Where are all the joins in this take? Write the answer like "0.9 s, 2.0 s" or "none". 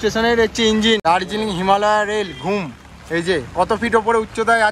1.0 s